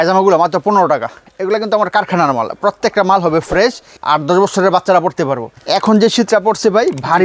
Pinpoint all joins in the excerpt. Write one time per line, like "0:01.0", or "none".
0:01.3
0:03.9
0:05.5